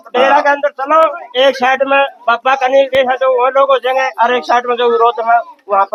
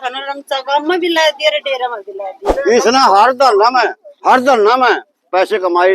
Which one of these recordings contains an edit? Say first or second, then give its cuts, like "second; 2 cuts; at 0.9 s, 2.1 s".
second; 1 cut; at 2.4 s